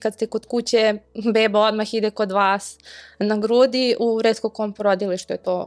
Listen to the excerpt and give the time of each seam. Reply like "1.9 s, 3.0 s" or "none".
none